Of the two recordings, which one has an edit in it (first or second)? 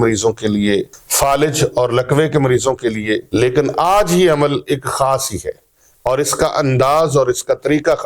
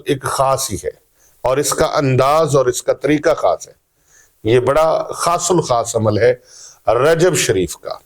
first